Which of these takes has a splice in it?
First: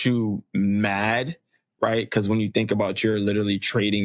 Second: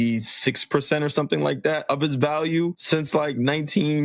second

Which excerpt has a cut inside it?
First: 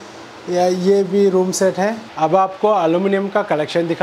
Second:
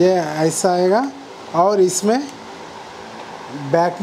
first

